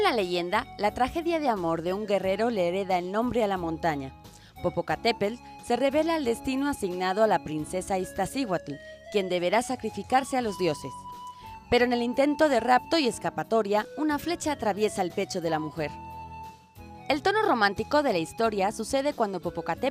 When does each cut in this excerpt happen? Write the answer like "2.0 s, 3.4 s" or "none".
none